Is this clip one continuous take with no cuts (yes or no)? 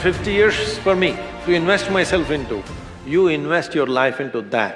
yes